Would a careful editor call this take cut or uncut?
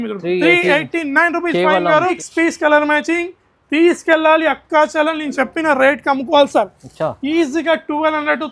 cut